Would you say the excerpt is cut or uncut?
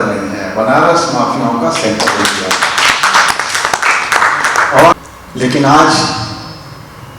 cut